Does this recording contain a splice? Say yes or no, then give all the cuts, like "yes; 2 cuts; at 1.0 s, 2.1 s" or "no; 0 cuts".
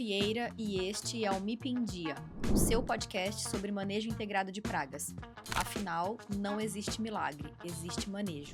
no; 0 cuts